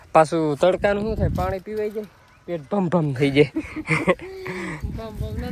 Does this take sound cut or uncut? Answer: uncut